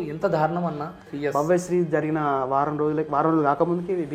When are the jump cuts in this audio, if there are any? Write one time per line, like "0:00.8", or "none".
0:01.1